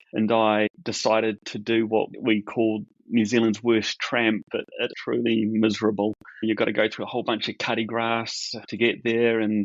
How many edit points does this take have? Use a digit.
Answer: 1